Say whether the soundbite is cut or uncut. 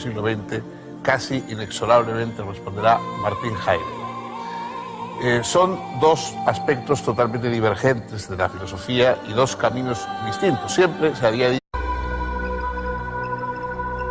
uncut